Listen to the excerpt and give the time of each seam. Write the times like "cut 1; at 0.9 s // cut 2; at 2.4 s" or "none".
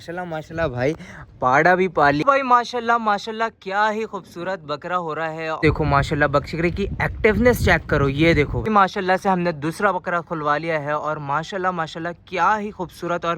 cut 1; at 2.2 s // cut 2; at 5.6 s // cut 3; at 8.6 s